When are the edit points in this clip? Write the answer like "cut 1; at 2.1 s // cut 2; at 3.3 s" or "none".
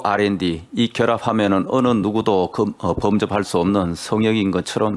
none